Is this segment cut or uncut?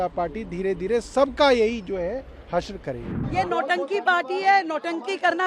cut